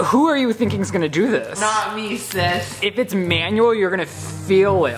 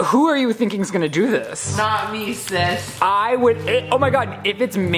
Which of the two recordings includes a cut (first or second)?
first